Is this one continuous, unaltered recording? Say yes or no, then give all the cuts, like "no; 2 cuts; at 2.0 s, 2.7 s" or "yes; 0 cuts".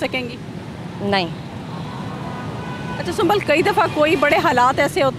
yes; 0 cuts